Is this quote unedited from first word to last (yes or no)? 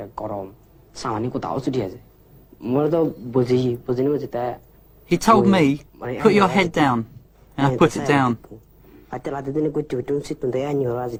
yes